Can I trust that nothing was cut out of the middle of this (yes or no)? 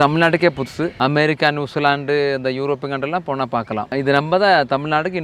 no